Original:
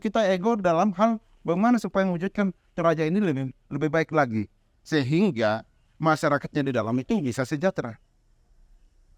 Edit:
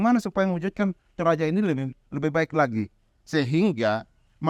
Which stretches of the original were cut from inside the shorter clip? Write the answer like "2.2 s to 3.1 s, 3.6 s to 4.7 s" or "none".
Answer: none